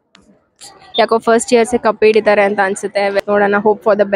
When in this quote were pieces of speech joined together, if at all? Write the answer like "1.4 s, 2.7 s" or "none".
none

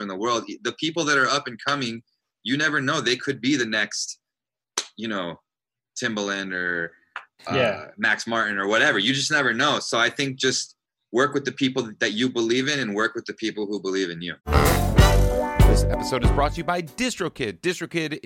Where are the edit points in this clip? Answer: 14.3 s

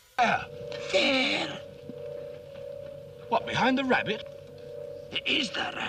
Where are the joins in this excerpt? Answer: none

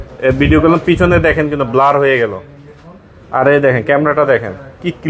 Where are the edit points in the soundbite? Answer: none

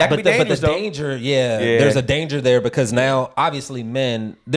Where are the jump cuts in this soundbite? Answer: none

